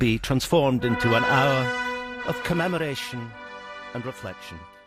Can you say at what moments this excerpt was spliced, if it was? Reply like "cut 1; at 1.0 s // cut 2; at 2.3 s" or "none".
none

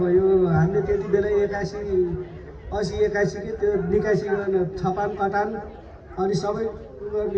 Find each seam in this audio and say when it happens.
none

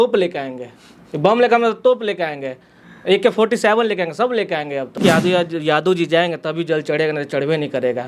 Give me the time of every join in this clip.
cut 1; at 5.0 s

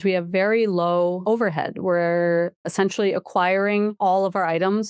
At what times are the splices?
cut 1; at 1.2 s // cut 2; at 2.7 s // cut 3; at 4.0 s

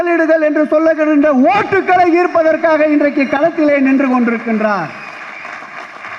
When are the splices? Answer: none

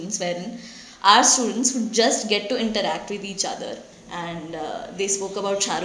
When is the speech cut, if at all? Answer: cut 1; at 3.8 s

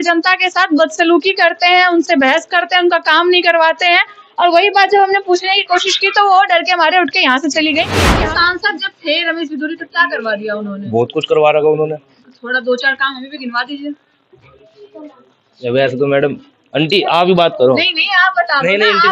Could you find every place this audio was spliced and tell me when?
cut 1; at 8.0 s

